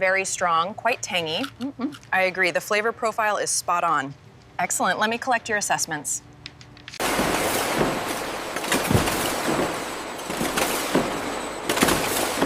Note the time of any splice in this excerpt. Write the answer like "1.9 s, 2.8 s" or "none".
none